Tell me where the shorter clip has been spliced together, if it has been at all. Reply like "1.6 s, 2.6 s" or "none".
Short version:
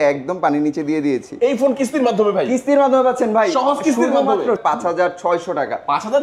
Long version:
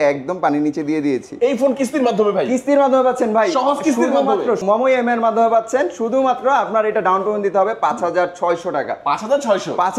4.6 s